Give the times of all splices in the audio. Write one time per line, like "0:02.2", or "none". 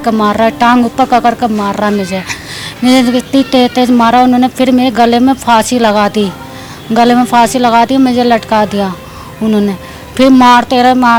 none